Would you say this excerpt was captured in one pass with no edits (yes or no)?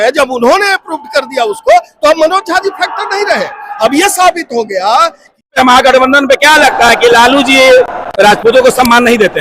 no